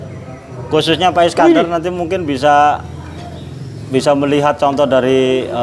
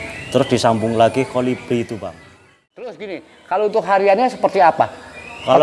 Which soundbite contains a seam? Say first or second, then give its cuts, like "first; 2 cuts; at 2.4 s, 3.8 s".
second; 1 cut; at 3.0 s